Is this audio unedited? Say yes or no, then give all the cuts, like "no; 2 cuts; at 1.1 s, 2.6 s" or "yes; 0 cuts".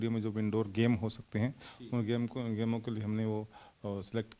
yes; 0 cuts